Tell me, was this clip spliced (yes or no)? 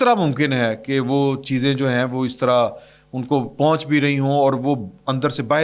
no